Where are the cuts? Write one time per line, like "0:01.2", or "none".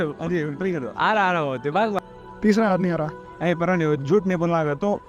0:02.0